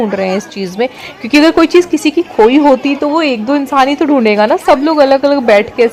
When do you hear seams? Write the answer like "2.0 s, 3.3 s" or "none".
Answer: none

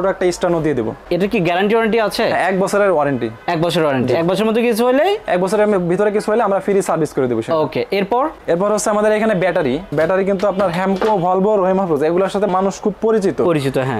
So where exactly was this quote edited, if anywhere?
none

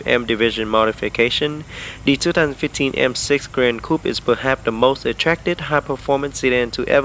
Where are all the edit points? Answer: none

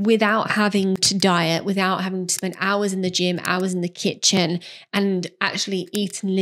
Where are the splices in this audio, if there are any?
none

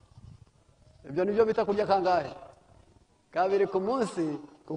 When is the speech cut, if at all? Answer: none

